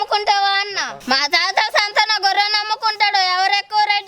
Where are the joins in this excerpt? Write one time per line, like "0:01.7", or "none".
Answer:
0:00.9